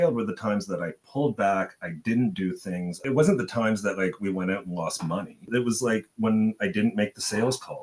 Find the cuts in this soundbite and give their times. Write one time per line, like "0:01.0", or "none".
0:03.0
0:05.5